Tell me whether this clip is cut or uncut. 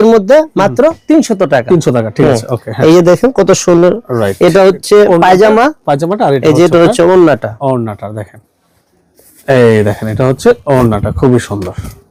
uncut